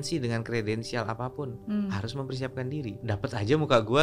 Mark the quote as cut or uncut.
cut